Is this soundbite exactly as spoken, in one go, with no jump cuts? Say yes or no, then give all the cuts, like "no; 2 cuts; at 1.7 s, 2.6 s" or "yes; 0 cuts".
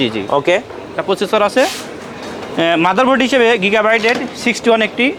yes; 0 cuts